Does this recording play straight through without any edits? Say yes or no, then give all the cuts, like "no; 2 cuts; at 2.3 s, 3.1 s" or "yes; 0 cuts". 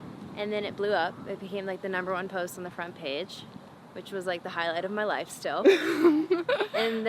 yes; 0 cuts